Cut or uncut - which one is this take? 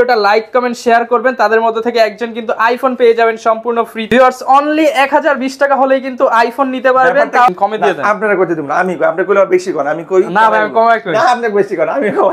cut